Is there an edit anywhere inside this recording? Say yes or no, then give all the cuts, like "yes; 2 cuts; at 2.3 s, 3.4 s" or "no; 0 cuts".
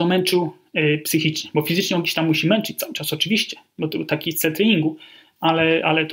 no; 0 cuts